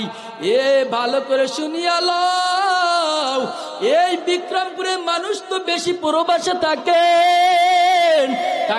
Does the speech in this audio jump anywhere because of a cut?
no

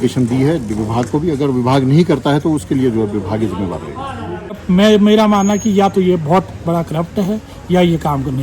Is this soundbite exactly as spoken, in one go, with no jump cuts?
no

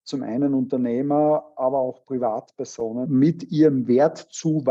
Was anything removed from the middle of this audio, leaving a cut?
yes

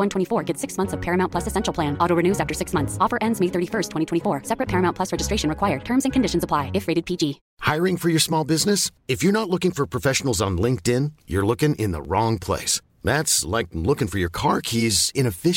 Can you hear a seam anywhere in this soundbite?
yes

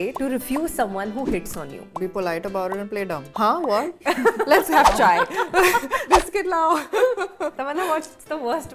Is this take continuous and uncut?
no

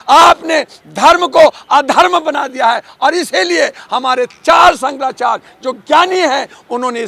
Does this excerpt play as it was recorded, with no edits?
yes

